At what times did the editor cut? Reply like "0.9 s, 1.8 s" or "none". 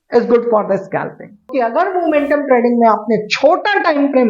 1.5 s